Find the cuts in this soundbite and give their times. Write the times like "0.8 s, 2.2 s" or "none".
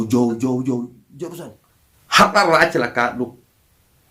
1.3 s